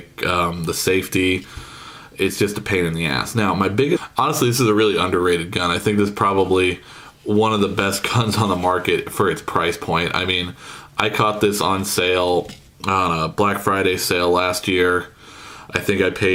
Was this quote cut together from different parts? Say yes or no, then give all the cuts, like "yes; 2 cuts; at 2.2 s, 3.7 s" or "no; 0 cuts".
no; 0 cuts